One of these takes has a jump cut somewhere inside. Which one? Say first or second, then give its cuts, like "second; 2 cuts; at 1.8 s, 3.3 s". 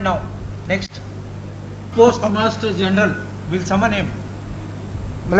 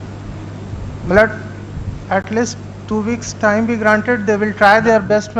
first; 1 cut; at 1.9 s